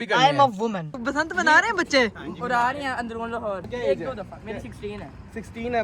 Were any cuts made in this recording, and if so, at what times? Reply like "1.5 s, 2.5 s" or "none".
1.0 s, 3.7 s